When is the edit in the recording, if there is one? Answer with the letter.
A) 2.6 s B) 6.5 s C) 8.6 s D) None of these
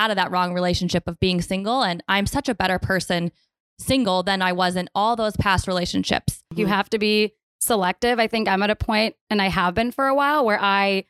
B